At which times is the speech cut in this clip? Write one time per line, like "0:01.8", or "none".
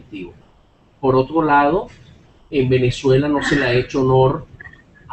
0:01.0